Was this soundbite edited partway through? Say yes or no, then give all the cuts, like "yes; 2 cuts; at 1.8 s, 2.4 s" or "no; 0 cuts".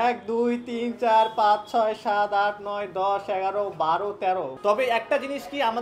yes; 1 cut; at 4.5 s